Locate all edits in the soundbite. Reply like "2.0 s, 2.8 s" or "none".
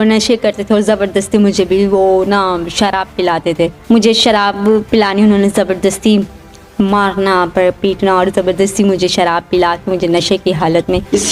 none